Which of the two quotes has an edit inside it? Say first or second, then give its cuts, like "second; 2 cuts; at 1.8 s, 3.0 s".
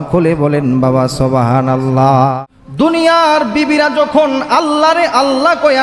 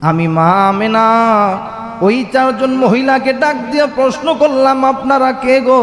first; 1 cut; at 2.4 s